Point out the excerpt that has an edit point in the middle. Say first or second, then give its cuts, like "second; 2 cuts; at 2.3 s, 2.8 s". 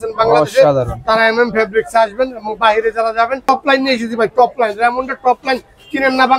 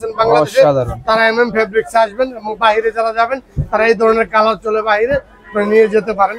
first; 1 cut; at 3.5 s